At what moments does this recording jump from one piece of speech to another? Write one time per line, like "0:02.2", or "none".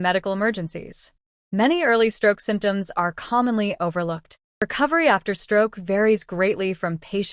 0:04.6